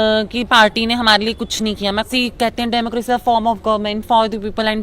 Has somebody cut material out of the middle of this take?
yes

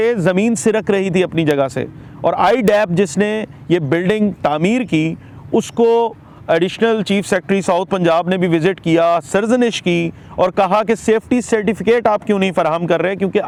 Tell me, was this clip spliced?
no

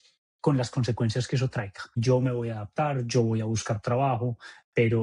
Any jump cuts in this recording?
yes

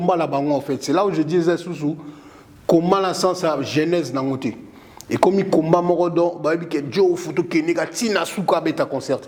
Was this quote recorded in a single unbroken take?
yes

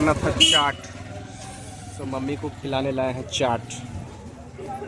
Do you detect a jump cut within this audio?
no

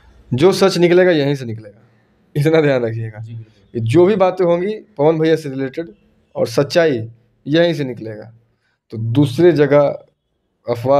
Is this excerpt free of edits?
yes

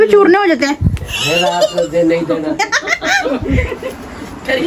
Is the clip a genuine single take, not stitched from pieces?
no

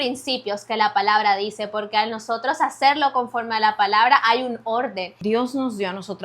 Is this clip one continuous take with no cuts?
no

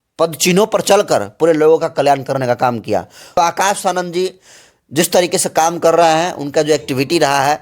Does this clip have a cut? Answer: yes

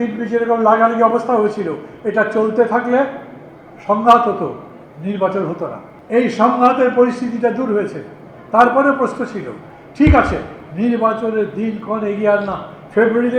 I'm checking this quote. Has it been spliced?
yes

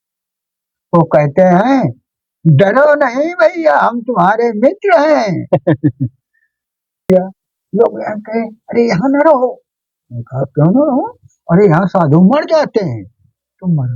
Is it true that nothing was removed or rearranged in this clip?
no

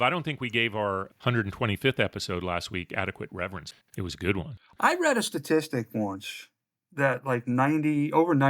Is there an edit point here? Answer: yes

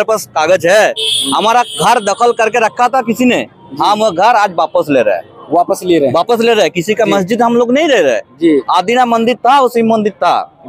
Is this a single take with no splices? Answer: yes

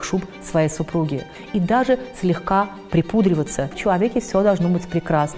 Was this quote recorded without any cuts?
no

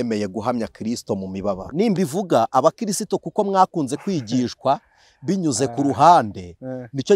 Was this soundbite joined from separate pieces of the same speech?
yes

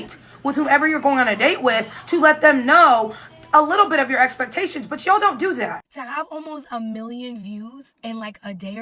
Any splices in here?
yes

